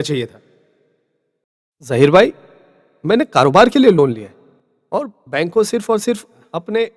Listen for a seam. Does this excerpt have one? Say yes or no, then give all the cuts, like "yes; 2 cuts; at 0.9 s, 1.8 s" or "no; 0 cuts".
no; 0 cuts